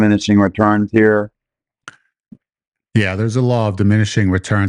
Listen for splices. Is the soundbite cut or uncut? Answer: uncut